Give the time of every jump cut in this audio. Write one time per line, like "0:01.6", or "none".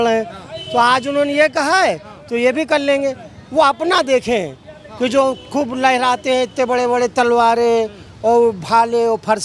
none